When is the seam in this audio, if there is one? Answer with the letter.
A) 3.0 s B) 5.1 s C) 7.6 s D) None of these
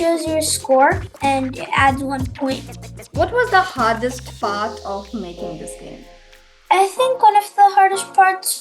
A